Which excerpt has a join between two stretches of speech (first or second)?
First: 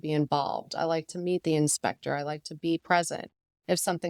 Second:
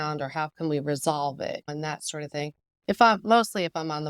second